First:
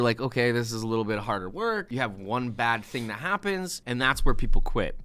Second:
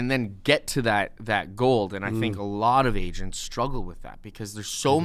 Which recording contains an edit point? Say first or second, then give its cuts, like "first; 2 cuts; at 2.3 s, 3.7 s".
first; 2 cuts; at 1.9 s, 3.8 s